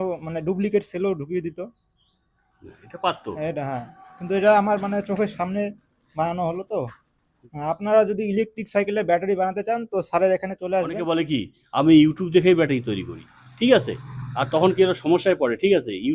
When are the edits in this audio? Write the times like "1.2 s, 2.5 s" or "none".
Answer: 7.4 s, 11.1 s